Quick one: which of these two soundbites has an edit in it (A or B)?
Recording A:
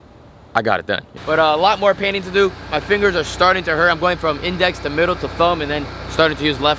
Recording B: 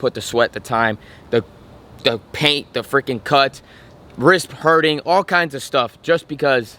A